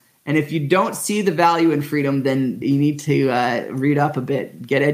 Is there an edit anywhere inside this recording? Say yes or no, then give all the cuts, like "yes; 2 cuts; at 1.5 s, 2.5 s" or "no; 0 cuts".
yes; 1 cut; at 2.6 s